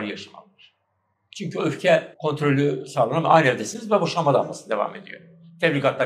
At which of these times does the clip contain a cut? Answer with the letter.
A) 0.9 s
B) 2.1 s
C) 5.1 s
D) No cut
B